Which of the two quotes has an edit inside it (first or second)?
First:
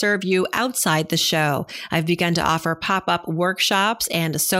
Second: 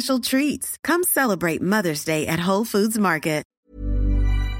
second